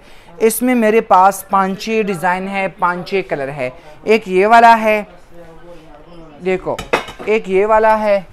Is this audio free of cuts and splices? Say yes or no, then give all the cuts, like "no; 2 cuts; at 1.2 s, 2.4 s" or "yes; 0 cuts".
yes; 0 cuts